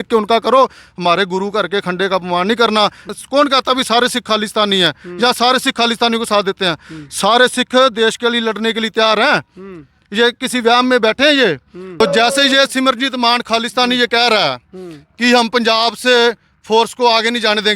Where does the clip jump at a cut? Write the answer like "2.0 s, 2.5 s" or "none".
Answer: 3.0 s, 12.0 s